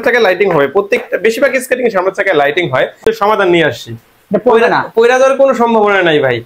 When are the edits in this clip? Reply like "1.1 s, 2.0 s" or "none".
3.0 s